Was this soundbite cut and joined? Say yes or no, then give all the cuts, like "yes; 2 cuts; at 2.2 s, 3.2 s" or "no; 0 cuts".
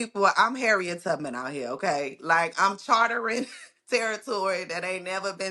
no; 0 cuts